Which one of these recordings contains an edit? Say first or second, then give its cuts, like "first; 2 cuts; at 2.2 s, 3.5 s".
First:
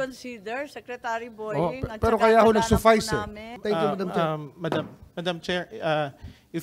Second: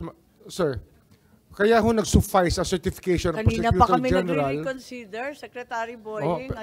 first; 1 cut; at 3.4 s